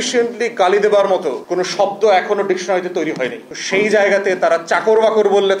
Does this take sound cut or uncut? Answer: uncut